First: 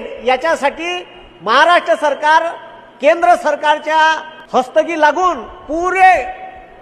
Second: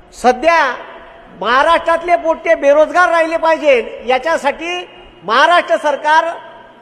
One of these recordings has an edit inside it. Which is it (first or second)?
first